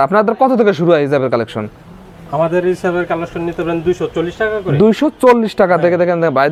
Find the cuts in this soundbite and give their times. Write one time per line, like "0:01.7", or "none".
none